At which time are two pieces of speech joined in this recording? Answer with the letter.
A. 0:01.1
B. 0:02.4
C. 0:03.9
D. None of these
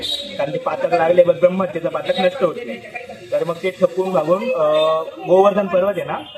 D